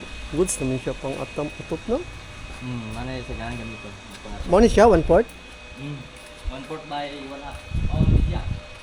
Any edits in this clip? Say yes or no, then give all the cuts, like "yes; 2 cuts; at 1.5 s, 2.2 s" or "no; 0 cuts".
no; 0 cuts